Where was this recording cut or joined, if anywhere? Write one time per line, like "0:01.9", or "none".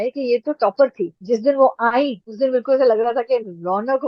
0:01.2